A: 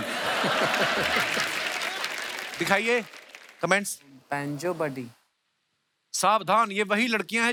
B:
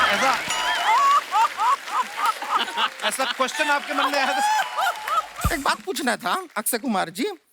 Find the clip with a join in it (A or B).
B